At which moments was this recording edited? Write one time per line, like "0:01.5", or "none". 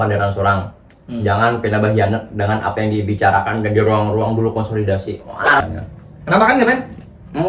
0:05.6